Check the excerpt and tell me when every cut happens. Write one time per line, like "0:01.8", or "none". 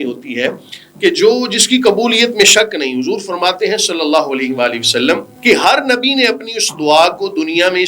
0:05.3